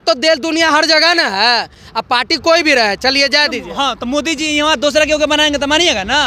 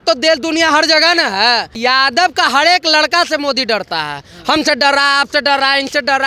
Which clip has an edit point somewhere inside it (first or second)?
second